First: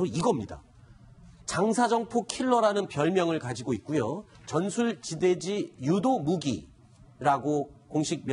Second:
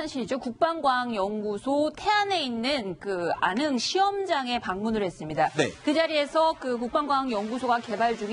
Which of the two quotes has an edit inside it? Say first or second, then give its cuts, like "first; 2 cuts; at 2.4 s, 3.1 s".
second; 1 cut; at 4.0 s